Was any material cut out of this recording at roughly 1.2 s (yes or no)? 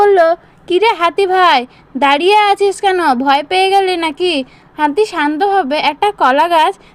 no